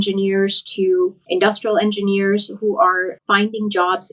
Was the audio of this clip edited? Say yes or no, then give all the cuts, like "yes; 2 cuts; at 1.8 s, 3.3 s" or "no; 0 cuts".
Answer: no; 0 cuts